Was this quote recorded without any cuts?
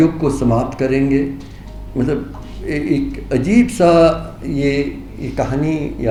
yes; 0 cuts

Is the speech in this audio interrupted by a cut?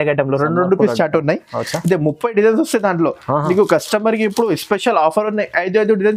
no; 0 cuts

